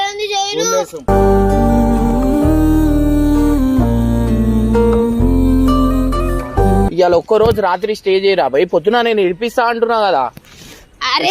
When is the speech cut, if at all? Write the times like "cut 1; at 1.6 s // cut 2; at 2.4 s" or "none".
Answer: cut 1; at 0.9 s // cut 2; at 6.9 s